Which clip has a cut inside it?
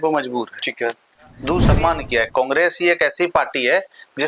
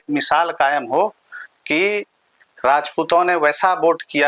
first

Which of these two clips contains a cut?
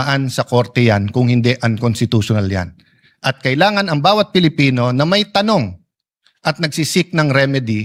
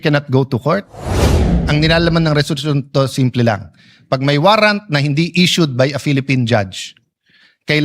second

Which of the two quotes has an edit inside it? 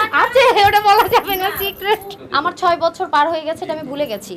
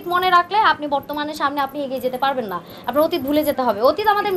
first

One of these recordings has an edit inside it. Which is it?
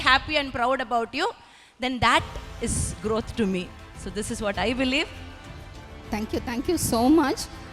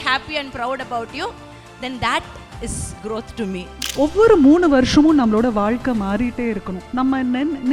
second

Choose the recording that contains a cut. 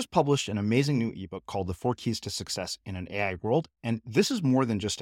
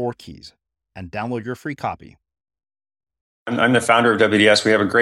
second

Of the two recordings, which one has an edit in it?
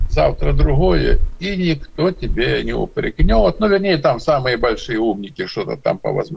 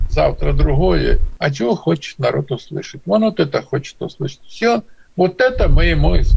second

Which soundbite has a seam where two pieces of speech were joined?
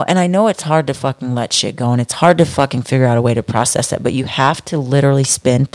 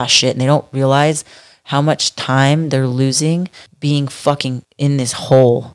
second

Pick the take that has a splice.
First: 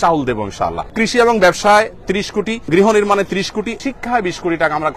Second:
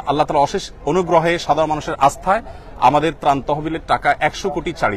first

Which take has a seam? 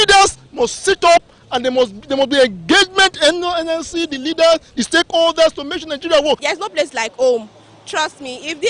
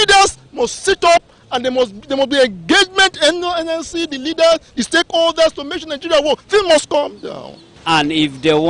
first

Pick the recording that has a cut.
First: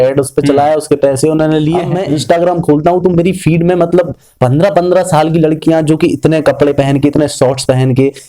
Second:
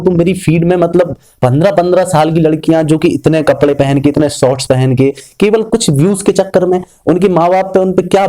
first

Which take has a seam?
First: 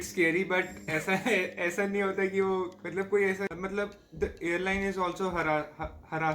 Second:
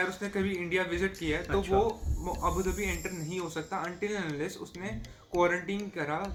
first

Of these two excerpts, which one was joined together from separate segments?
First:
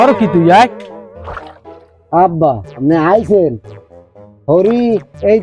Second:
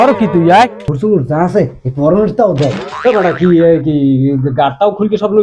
second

